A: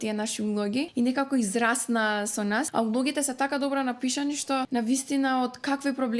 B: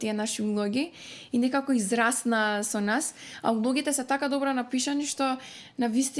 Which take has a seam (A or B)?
A